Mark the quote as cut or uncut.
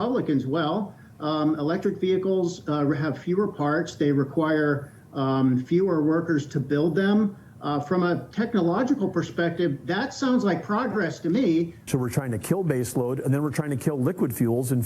cut